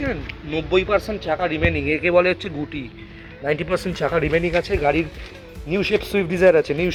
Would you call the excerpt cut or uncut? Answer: uncut